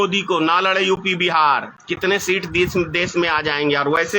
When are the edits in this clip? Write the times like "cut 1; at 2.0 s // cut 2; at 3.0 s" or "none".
cut 1; at 1.8 s